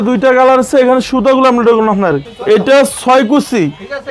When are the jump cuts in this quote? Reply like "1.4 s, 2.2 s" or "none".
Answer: 2.3 s